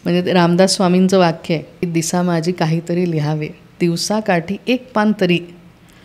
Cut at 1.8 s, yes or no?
no